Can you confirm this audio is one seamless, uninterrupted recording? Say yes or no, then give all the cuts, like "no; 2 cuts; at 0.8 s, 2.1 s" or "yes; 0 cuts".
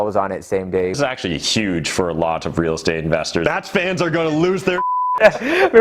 no; 2 cuts; at 1.0 s, 3.4 s